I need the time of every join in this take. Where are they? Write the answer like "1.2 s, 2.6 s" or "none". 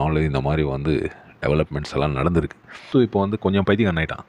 2.9 s

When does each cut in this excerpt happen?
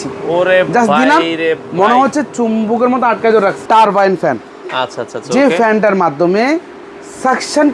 3.6 s

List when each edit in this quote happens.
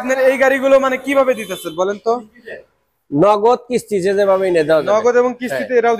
none

